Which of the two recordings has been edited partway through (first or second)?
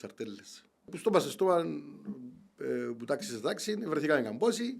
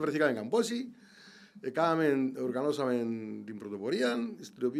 first